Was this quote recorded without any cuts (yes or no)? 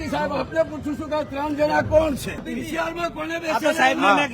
no